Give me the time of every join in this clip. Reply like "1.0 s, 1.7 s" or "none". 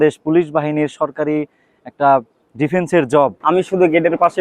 3.4 s

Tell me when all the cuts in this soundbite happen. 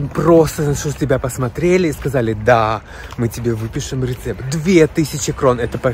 none

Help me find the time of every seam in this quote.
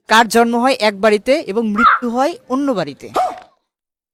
none

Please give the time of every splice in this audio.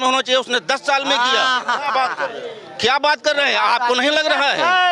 none

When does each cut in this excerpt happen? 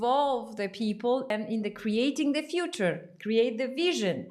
1.3 s

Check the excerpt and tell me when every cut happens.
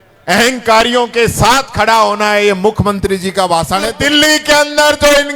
3.9 s

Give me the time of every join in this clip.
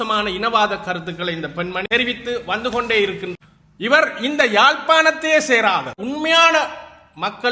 1.8 s, 3.3 s, 6.0 s

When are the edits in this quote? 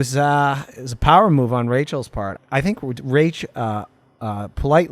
2.4 s

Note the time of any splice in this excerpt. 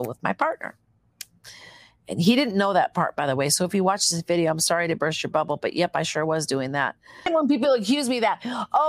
7.3 s

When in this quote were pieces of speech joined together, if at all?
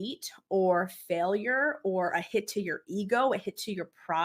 none

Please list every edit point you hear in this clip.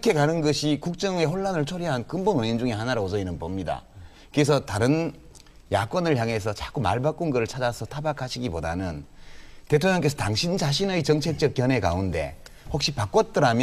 6.4 s

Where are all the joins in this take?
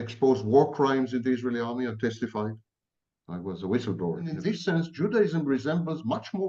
4.4 s

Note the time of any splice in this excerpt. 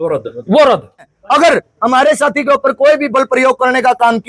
1.2 s

